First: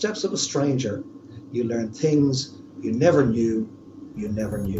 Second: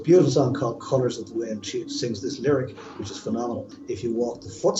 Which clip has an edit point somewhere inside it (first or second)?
second